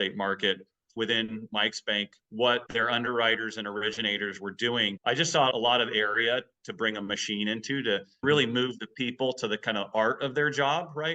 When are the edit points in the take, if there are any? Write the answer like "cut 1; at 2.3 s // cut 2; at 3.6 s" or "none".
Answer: cut 1; at 0.9 s // cut 2; at 2.7 s // cut 3; at 4.9 s